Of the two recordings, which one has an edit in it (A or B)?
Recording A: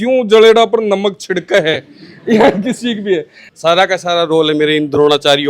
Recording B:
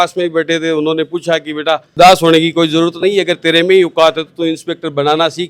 A